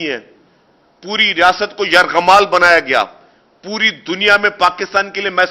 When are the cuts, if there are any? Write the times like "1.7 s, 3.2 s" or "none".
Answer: none